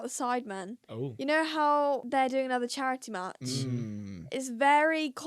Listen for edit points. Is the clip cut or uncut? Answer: cut